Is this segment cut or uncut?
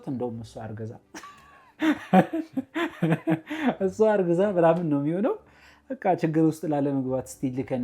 uncut